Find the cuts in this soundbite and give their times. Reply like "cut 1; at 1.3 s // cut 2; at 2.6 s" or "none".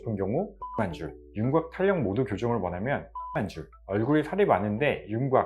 cut 1; at 1.1 s // cut 2; at 3.7 s